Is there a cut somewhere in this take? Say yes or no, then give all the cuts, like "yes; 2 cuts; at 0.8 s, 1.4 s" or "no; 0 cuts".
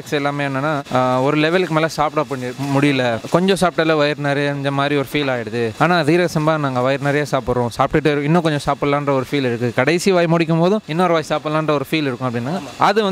no; 0 cuts